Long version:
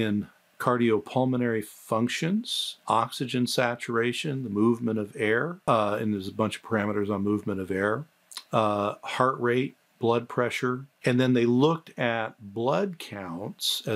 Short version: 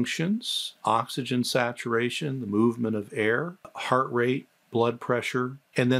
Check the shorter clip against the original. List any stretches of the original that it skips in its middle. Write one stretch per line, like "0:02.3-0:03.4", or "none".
0:05.6-0:08.9